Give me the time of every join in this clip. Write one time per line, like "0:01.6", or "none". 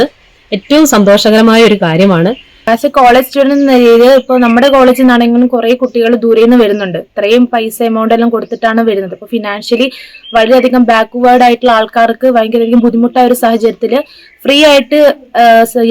0:02.5